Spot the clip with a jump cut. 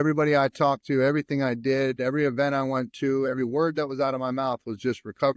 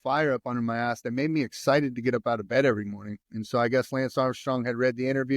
second; 1 cut; at 3.3 s

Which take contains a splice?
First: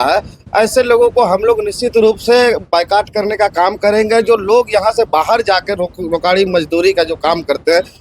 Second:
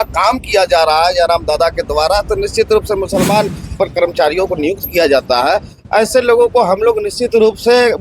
second; 1 cut; at 3.7 s

